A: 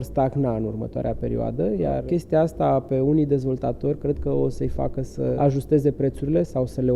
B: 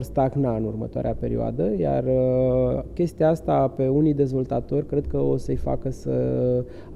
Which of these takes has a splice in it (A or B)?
A